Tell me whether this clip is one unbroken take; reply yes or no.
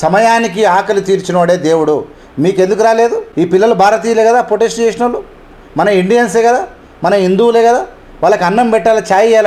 yes